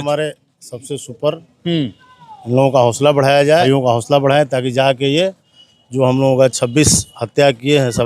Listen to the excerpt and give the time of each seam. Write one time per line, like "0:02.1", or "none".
0:03.6